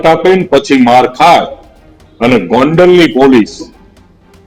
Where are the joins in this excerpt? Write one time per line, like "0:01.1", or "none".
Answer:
none